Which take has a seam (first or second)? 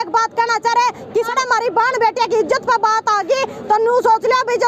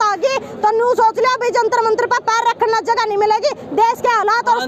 first